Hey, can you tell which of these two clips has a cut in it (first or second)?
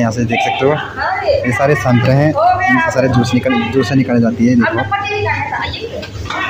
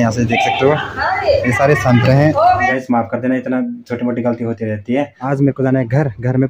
second